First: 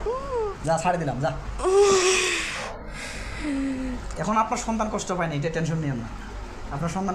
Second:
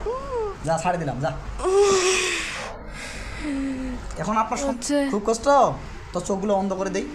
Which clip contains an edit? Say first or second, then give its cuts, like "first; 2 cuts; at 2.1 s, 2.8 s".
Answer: second; 1 cut; at 4.7 s